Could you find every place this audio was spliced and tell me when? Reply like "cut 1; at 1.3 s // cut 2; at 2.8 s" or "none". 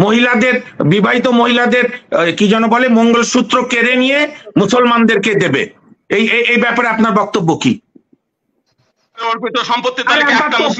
cut 1; at 9.2 s